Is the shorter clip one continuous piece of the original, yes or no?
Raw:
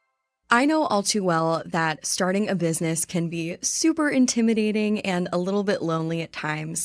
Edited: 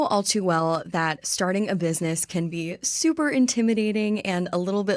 yes